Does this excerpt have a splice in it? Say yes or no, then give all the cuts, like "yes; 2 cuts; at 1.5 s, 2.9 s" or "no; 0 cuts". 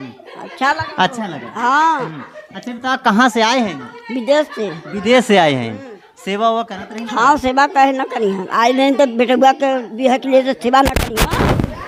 no; 0 cuts